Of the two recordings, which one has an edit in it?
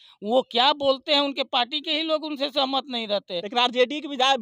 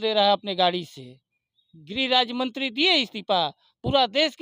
first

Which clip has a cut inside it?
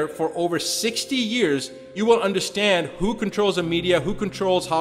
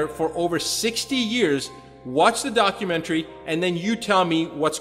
first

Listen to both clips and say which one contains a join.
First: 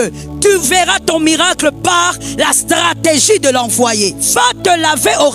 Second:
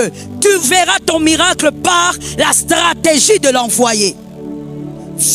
first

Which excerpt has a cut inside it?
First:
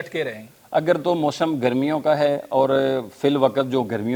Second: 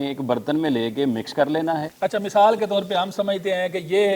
second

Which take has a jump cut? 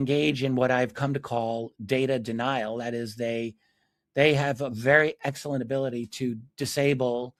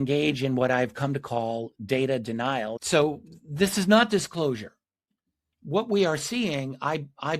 second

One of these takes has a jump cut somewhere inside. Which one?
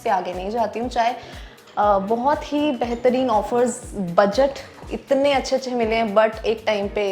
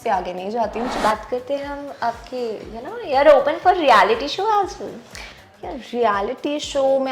second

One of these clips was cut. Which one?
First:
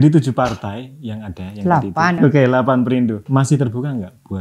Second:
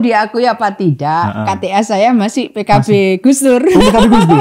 first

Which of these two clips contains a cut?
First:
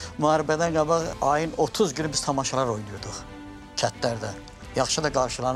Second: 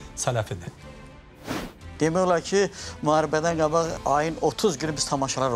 second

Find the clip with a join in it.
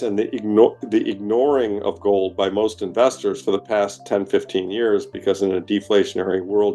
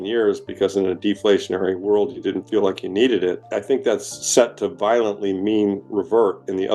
second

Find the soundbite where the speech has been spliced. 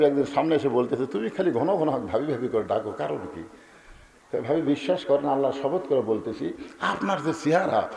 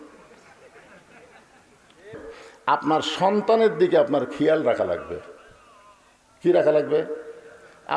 second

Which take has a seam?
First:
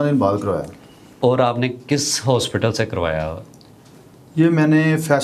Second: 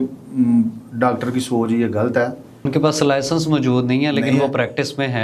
second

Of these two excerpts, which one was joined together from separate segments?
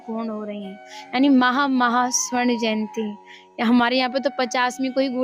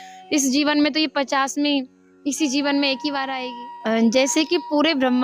second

